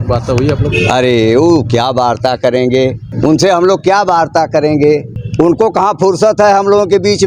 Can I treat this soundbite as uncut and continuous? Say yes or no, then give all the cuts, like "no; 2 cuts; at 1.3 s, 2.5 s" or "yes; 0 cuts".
no; 2 cuts; at 3.1 s, 5.2 s